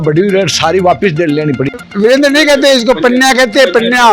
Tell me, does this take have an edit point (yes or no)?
yes